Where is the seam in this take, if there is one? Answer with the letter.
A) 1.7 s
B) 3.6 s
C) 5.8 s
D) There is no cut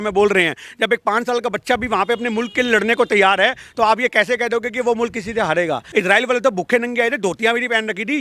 C